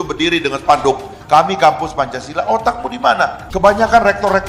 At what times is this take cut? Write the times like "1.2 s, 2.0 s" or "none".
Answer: 3.4 s